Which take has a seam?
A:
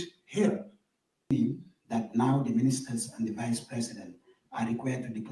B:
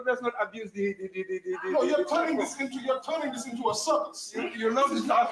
A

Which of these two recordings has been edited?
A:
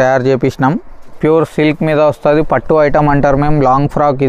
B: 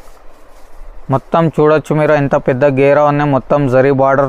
A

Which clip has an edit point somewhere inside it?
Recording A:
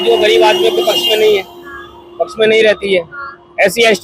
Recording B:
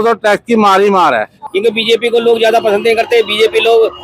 B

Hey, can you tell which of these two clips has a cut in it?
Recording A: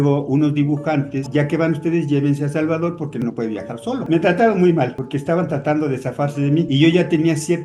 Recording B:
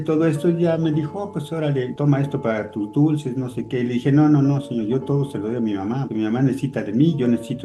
A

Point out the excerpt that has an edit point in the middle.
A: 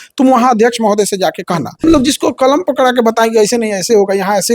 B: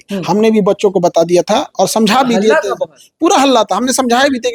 A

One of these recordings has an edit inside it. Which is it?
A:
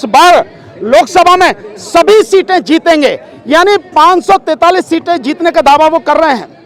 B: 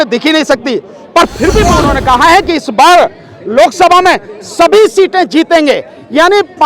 B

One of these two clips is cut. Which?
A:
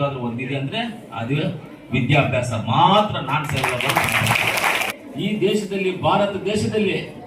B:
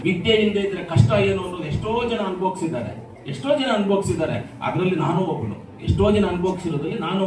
A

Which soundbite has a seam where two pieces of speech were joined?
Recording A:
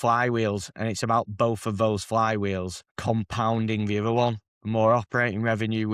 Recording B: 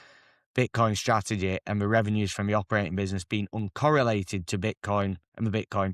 A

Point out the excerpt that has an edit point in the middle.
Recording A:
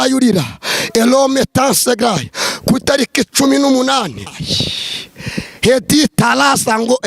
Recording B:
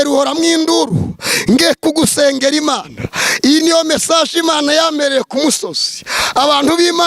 A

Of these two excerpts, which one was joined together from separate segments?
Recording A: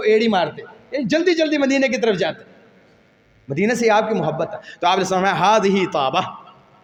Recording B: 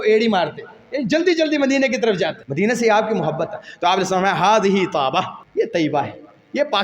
B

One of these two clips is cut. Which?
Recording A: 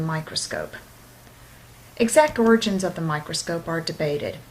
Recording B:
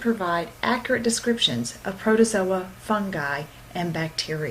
B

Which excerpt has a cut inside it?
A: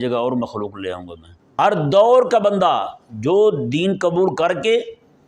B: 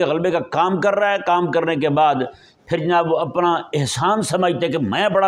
A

